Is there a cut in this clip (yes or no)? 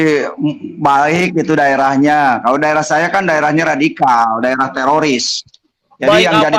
no